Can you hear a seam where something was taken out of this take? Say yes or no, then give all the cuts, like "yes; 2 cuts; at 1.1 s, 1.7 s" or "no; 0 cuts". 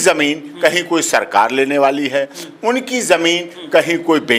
no; 0 cuts